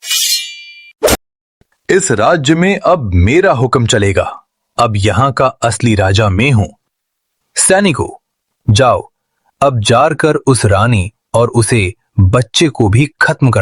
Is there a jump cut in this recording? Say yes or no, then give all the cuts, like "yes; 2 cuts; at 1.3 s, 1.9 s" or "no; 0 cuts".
no; 0 cuts